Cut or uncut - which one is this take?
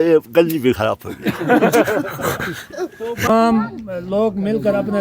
cut